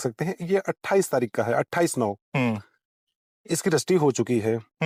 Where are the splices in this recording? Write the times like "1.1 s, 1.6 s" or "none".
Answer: none